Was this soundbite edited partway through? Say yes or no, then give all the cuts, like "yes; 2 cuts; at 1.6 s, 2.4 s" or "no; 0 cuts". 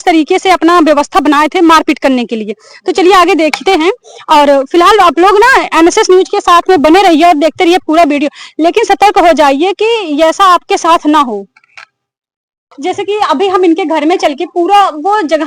no; 0 cuts